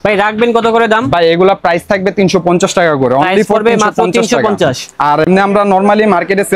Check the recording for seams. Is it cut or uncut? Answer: uncut